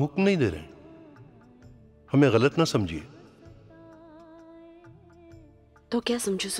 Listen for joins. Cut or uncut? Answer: uncut